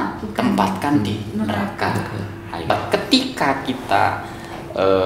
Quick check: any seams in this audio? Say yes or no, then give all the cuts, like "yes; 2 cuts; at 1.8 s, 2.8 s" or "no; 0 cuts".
yes; 1 cut; at 2.7 s